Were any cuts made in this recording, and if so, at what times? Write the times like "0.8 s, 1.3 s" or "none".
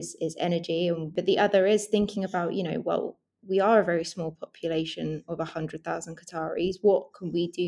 1.1 s